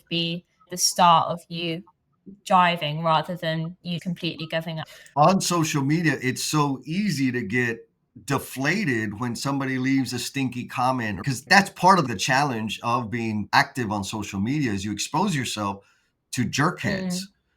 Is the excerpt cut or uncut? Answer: uncut